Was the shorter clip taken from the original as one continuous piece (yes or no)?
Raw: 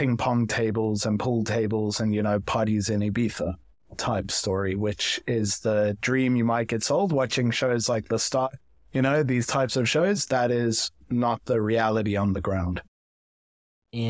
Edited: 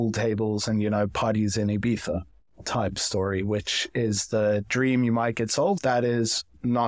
no